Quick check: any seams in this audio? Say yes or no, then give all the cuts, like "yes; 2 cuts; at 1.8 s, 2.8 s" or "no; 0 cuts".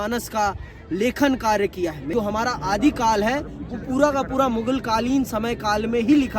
yes; 1 cut; at 2.1 s